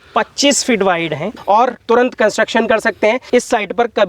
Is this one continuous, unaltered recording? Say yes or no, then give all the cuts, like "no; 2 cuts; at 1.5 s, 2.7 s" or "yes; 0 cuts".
no; 2 cuts; at 1.4 s, 3.2 s